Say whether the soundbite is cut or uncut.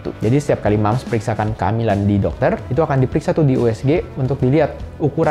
uncut